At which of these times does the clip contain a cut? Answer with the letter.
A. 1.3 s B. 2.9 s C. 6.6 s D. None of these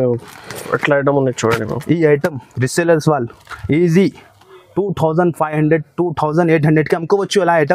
D